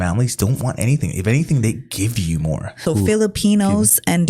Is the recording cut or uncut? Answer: cut